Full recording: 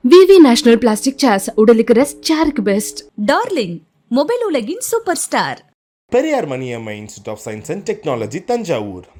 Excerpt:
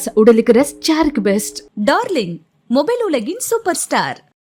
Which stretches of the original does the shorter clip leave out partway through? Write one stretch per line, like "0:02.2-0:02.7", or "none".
none